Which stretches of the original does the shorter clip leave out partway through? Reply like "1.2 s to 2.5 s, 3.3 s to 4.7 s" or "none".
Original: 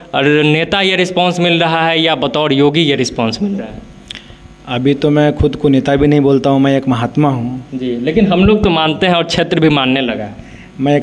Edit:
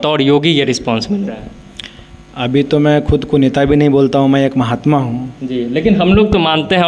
none